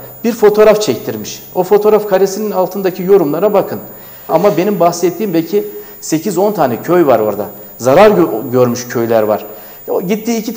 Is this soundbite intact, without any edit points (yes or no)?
no